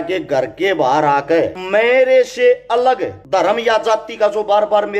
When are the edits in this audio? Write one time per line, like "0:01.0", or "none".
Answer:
0:01.6
0:03.1